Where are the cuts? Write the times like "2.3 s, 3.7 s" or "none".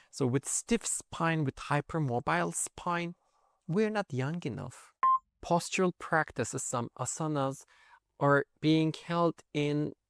5.3 s